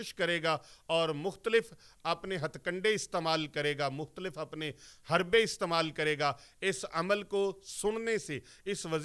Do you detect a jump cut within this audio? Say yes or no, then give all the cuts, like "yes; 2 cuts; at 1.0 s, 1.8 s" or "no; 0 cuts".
no; 0 cuts